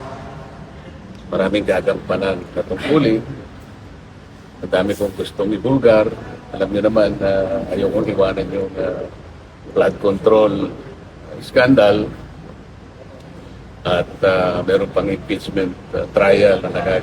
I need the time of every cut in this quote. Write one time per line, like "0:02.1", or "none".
none